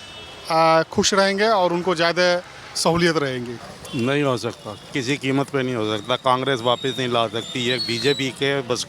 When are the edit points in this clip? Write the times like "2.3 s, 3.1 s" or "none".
3.6 s